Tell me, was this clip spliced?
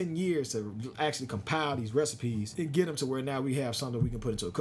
yes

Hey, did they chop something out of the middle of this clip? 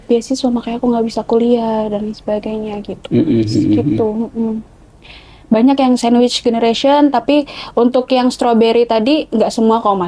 no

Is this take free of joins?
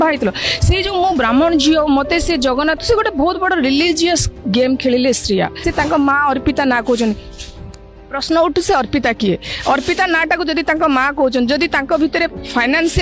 no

